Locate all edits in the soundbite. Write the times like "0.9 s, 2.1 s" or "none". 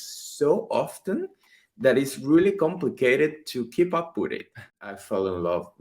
4.7 s